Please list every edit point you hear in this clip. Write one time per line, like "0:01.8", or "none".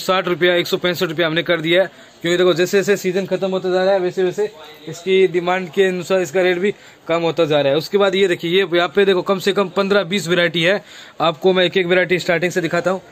none